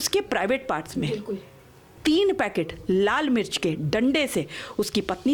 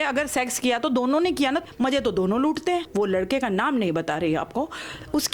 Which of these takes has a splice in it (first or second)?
second